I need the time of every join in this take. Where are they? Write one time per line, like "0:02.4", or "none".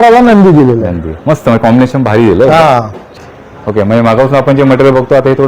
0:03.2